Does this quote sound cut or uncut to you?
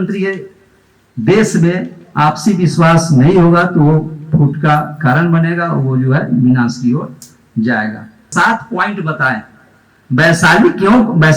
cut